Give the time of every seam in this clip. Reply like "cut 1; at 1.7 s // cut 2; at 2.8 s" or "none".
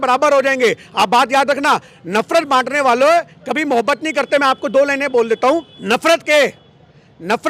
cut 1; at 5.7 s